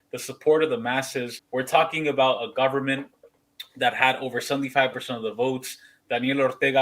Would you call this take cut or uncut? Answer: cut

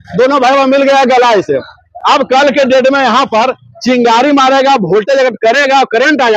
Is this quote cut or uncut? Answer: uncut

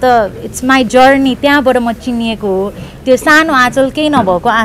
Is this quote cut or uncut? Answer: uncut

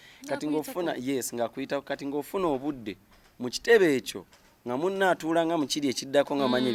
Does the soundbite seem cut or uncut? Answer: uncut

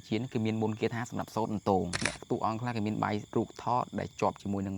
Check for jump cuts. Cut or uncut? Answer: cut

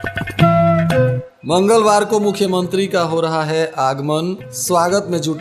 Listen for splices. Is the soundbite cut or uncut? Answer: cut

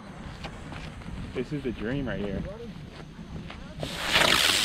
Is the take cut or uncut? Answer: uncut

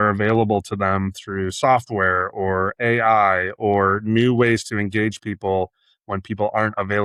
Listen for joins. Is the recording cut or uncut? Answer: uncut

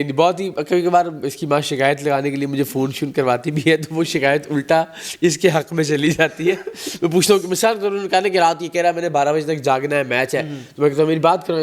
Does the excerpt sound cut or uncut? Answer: uncut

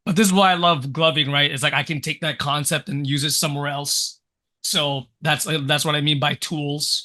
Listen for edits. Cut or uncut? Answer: uncut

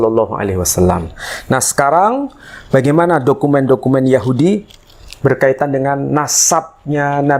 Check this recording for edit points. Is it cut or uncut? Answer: uncut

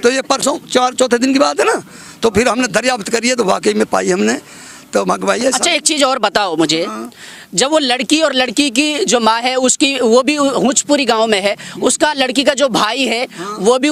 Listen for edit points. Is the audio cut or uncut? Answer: uncut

